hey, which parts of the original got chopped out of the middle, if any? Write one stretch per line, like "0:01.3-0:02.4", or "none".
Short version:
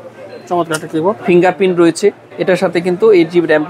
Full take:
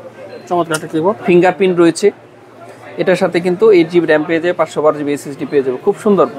0:02.3-0:02.9